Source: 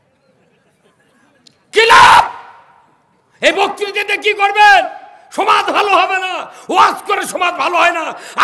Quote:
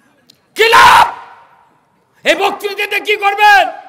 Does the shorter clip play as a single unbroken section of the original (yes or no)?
yes